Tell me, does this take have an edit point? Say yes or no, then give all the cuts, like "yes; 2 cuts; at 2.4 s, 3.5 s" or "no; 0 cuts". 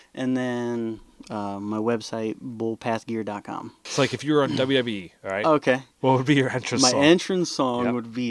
yes; 1 cut; at 3.8 s